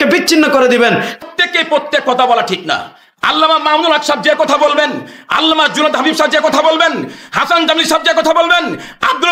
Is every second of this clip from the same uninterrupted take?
no; 1 cut; at 1.2 s

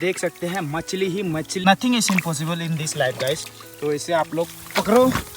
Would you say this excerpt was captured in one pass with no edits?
no; 1 cut; at 1.6 s

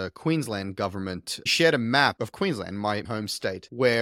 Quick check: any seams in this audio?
yes; 1 cut; at 1.5 s

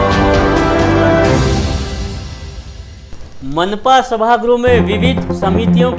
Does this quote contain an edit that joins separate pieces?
no; 0 cuts

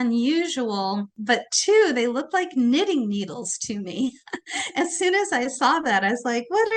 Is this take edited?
yes; 1 cut; at 1.2 s

